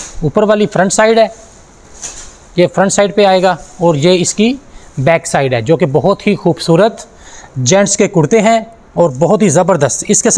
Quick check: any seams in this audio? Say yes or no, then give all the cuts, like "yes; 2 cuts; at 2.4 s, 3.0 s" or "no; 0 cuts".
no; 0 cuts